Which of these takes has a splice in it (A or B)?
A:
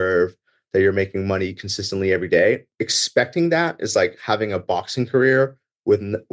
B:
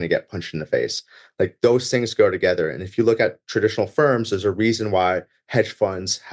A